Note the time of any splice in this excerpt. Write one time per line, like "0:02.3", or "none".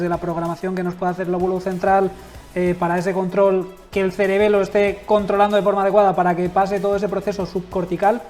none